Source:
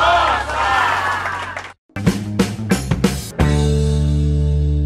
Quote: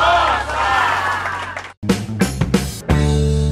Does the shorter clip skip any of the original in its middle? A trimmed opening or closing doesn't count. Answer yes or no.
yes